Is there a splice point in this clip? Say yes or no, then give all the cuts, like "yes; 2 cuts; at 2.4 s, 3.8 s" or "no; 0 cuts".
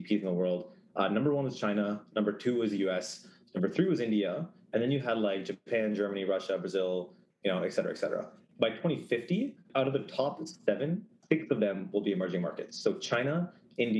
yes; 3 cuts; at 8.5 s, 9.6 s, 11.2 s